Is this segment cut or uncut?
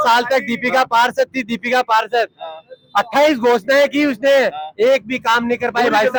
uncut